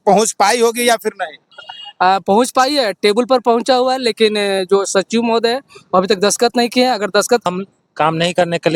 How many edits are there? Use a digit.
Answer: 1